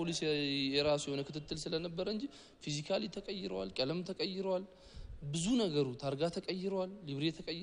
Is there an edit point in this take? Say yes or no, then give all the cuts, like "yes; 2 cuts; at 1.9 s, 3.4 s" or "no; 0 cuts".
no; 0 cuts